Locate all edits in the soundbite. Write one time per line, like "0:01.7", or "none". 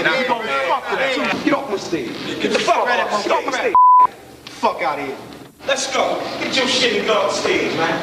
0:01.4